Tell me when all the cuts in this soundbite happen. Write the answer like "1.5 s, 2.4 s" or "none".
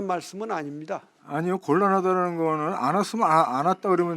1.1 s